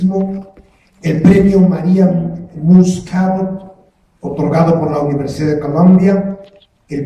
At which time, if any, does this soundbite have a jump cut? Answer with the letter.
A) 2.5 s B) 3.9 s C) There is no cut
C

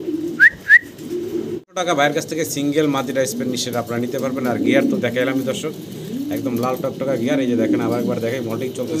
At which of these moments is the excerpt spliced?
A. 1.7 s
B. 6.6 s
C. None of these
A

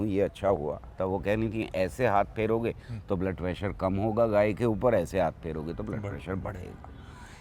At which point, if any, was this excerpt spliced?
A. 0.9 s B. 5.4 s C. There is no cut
A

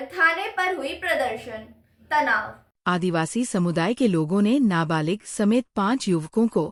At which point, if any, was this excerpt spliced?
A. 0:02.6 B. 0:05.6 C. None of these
C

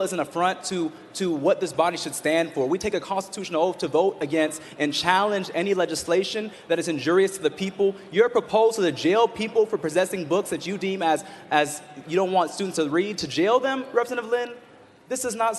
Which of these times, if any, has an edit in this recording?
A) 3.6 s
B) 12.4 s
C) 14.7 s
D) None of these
D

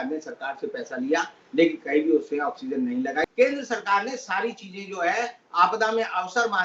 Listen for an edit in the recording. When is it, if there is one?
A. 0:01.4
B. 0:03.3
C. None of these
B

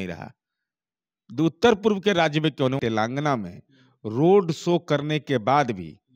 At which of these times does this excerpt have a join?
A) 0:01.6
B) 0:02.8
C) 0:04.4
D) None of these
B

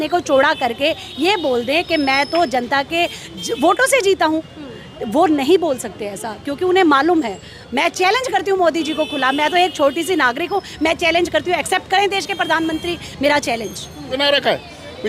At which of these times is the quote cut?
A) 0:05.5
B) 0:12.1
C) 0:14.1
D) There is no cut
C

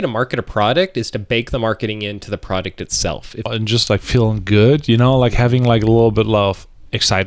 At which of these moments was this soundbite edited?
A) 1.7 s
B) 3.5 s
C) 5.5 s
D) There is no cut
B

